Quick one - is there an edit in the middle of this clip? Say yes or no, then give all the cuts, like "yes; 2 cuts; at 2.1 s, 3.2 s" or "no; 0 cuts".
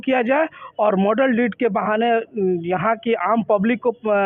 no; 0 cuts